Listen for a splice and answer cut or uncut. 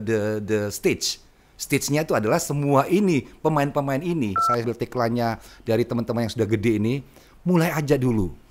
cut